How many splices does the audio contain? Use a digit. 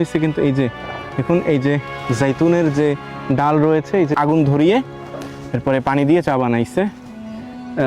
1